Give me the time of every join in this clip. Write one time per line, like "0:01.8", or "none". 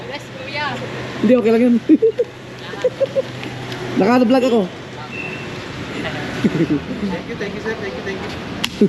none